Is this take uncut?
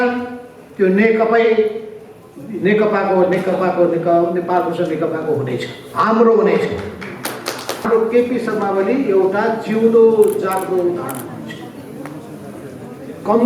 no; 1 cut; at 7.9 s

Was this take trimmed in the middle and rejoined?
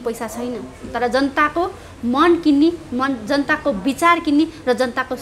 no; 0 cuts

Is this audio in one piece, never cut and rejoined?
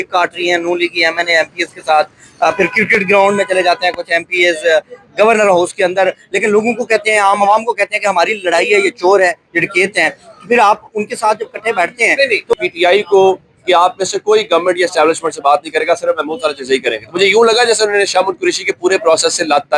no; 1 cut; at 12.5 s

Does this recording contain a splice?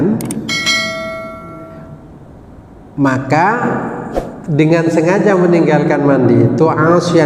no; 0 cuts

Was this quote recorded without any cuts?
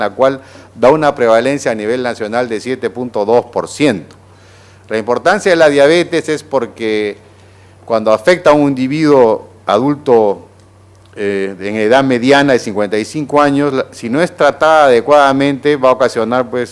yes; 0 cuts

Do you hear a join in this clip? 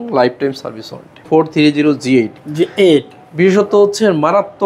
yes; 1 cut; at 1.2 s

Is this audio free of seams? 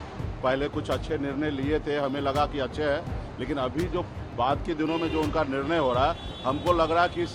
yes; 0 cuts

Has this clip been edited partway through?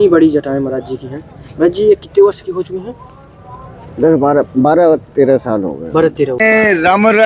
yes; 1 cut; at 6.3 s

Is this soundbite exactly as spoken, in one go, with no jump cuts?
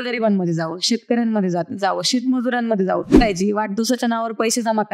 no; 1 cut; at 3.2 s

